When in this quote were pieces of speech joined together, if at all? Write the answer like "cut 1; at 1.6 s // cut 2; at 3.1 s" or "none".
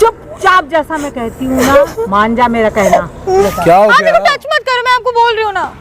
cut 1; at 3.4 s

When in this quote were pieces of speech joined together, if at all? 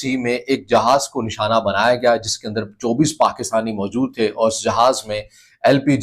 none

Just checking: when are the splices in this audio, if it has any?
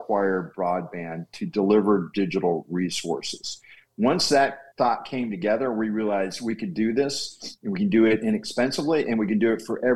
none

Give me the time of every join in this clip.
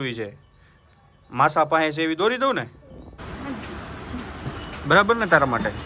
cut 1; at 3.2 s

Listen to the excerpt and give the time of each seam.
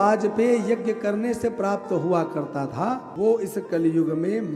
cut 1; at 3.1 s

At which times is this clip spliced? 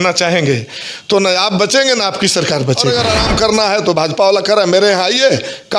cut 1; at 2.8 s

